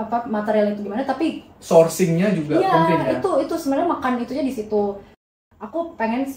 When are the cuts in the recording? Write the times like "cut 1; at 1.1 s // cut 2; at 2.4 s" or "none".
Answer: cut 1; at 5.3 s